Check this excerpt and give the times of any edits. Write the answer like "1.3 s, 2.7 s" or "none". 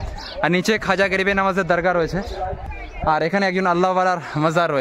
2.6 s